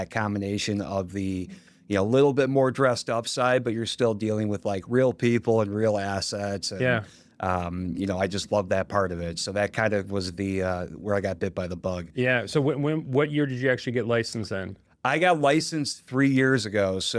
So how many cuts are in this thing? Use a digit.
0